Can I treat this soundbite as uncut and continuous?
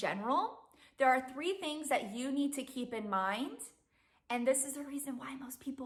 yes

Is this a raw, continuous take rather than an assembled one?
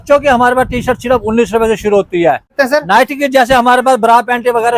no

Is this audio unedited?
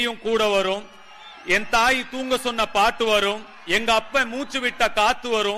yes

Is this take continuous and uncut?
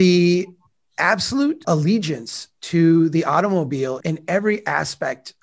no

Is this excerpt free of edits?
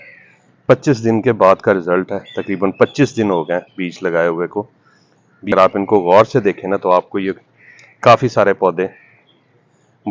no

